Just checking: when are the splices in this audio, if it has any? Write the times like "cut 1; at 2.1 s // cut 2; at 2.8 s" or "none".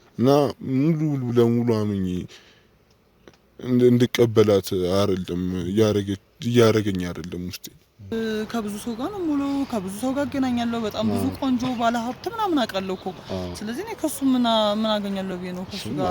cut 1; at 8.1 s

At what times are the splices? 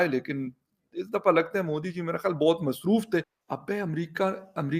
none

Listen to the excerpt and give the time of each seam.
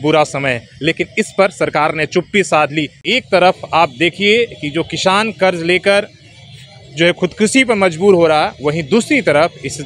cut 1; at 3.0 s

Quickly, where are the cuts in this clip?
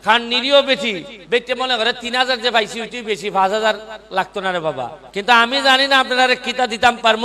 cut 1; at 1.1 s // cut 2; at 5.0 s

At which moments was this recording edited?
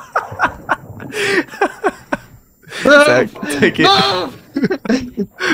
none

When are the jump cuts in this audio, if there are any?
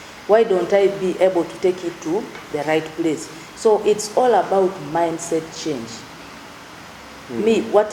none

